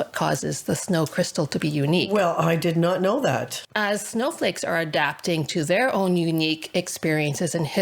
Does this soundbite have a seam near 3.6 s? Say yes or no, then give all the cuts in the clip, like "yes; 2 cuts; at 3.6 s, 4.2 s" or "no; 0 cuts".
yes; 1 cut; at 3.6 s